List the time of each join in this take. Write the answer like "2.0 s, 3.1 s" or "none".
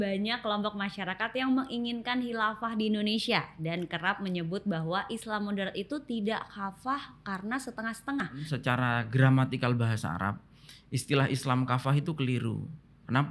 8.5 s